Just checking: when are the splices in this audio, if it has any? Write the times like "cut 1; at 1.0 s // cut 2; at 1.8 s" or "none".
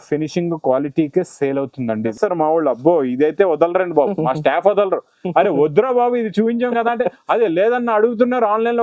cut 1; at 2.1 s